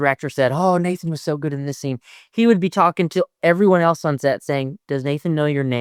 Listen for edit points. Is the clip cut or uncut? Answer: uncut